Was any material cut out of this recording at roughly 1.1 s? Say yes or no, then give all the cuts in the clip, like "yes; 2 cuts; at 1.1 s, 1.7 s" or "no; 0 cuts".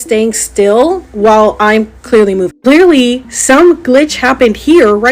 no; 1 cut; at 2.5 s